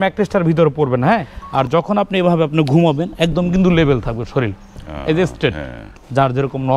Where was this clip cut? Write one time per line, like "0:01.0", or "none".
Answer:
0:01.4
0:05.8